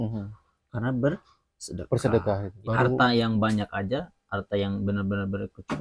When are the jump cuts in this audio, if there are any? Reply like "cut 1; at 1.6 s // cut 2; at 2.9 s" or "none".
cut 1; at 2.5 s